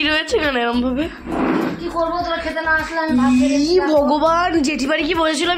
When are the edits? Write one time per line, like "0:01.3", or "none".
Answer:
none